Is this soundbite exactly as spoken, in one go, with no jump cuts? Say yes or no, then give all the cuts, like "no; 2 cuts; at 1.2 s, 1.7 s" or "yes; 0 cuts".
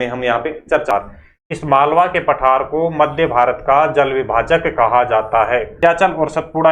no; 2 cuts; at 0.9 s, 5.8 s